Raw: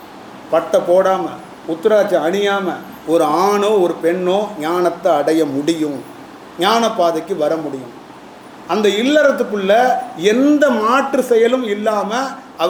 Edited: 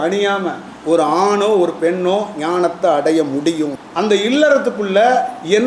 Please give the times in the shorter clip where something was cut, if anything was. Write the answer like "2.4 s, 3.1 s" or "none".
3.8 s